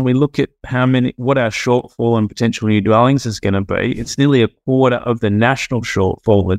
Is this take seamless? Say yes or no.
yes